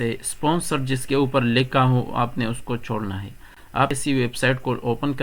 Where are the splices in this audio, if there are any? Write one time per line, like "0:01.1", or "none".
0:03.9